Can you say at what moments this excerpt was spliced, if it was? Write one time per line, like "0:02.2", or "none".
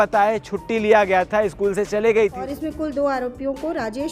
0:02.4